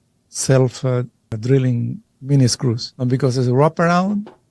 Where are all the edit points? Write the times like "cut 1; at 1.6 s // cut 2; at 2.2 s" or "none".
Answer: cut 1; at 1.2 s // cut 2; at 2.1 s